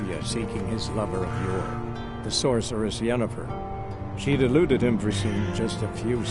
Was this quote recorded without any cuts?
no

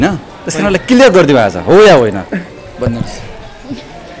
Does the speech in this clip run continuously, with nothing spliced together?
yes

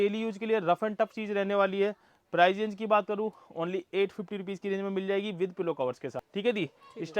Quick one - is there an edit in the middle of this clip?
yes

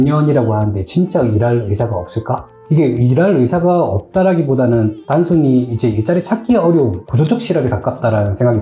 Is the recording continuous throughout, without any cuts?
no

